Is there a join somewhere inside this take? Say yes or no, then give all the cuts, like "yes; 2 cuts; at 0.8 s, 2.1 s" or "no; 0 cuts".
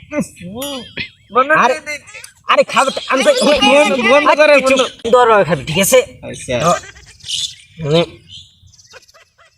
yes; 1 cut; at 5.0 s